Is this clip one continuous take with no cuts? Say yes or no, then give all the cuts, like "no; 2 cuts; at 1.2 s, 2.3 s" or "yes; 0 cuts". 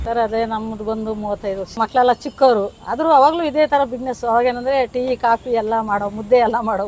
no; 1 cut; at 1.8 s